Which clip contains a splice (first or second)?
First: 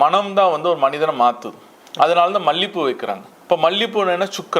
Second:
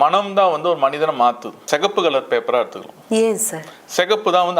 second